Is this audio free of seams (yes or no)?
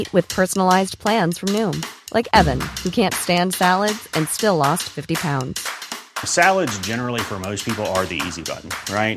yes